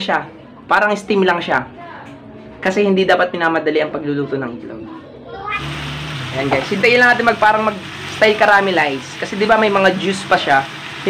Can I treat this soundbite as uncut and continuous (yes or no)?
no